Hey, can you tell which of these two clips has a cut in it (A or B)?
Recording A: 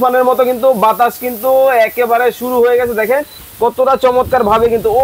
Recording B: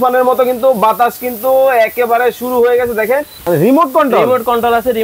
B